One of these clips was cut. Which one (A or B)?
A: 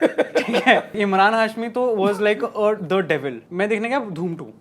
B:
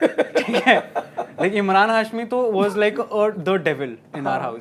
A